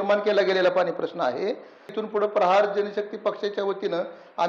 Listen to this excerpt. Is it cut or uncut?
cut